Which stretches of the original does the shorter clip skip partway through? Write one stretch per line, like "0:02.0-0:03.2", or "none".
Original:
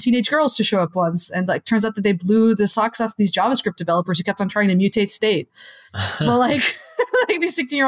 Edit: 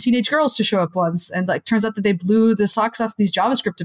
none